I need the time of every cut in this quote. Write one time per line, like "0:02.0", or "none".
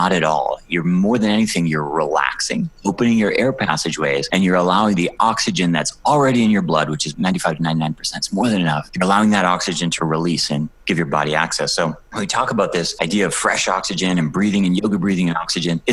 0:07.1